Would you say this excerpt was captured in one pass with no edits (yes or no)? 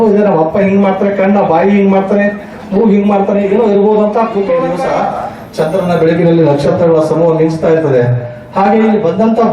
no